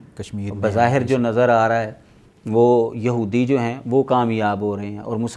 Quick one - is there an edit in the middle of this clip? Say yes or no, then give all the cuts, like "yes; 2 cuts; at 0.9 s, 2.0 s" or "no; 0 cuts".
no; 0 cuts